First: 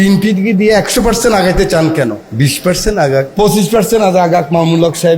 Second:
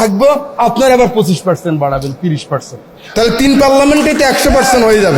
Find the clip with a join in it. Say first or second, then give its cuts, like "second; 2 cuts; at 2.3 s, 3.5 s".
first; 2 cuts; at 2.2 s, 3.3 s